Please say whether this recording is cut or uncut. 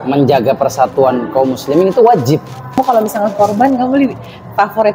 cut